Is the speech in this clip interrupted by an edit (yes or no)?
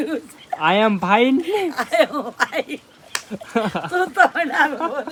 no